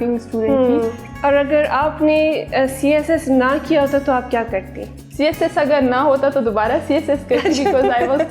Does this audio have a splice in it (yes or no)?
no